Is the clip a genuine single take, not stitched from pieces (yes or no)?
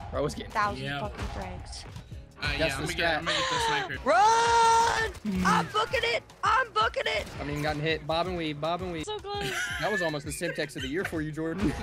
no